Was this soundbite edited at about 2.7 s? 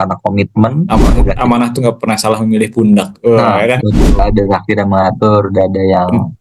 no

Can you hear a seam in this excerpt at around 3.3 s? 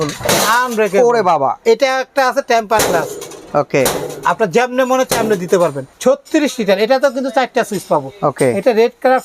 no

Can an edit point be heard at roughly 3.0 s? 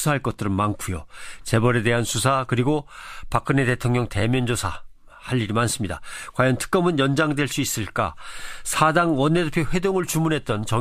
no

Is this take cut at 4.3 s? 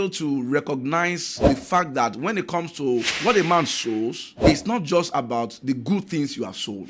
yes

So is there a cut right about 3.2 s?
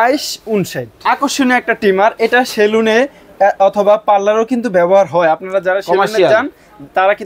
no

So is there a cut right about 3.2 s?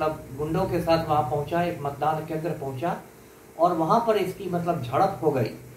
no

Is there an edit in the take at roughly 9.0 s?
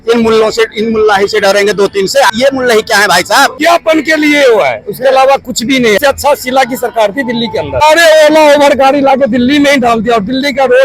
no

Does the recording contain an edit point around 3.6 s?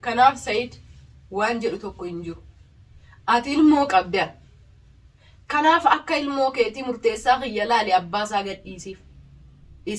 no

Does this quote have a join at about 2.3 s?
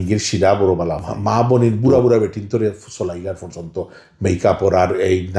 no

